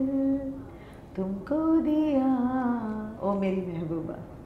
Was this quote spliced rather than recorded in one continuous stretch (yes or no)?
no